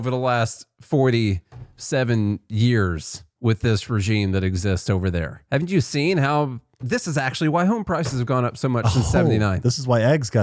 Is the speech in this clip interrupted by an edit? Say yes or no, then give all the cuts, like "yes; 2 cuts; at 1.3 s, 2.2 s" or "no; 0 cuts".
yes; 2 cuts; at 5.4 s, 6.8 s